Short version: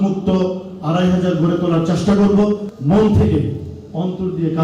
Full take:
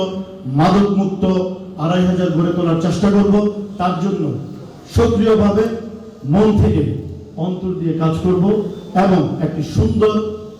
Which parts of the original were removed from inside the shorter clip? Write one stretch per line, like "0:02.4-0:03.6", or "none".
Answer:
0:03.7-0:06.1